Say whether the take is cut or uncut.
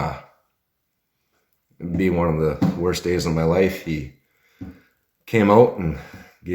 uncut